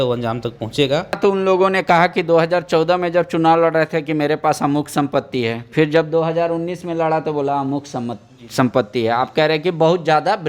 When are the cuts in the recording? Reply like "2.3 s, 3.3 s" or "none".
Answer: 1.2 s